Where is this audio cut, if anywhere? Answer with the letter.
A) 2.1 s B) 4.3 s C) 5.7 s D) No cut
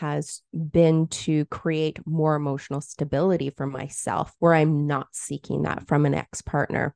B